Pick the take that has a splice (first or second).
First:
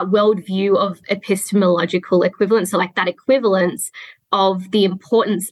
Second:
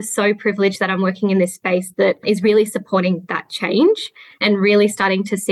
second